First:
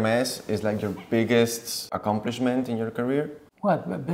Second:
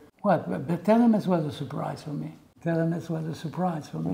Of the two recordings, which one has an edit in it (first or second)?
first